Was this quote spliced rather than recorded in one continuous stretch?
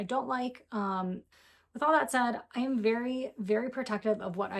yes; 1 cut; at 1.3 s

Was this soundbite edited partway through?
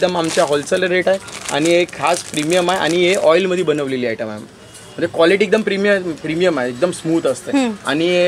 no; 0 cuts

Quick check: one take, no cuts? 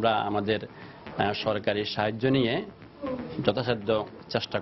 yes; 0 cuts

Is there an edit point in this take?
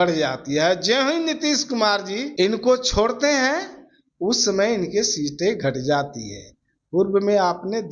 yes; 1 cut; at 2.3 s

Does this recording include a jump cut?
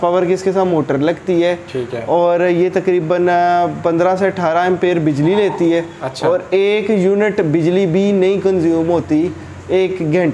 no; 0 cuts

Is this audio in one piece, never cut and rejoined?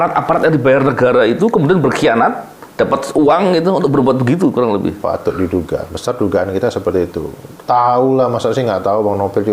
yes; 0 cuts

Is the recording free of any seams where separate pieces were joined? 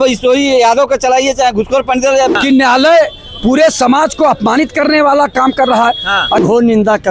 no; 2 cuts; at 2.4 s, 6.4 s

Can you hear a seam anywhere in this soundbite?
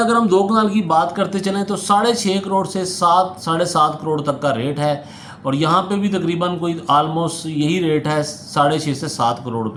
no; 0 cuts

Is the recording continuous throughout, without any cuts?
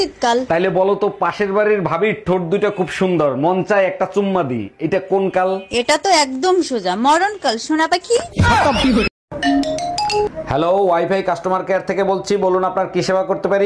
no; 1 cut; at 9.2 s

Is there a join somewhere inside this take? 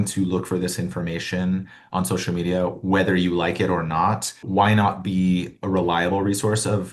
no; 0 cuts

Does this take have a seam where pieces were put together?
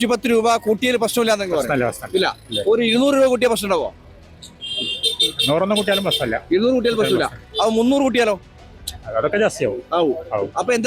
no; 0 cuts

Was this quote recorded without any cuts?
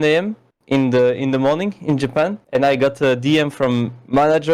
yes; 0 cuts

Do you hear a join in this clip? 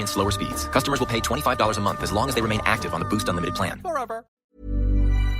yes; 1 cut; at 4.4 s

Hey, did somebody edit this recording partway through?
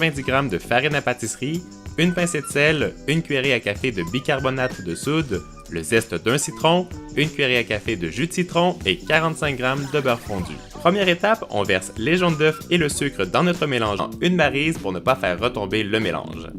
no; 0 cuts

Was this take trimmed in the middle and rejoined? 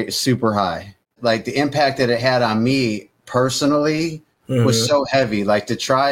yes; 1 cut; at 1.2 s

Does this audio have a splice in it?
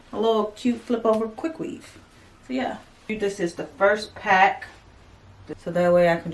yes; 2 cuts; at 3.1 s, 5.4 s

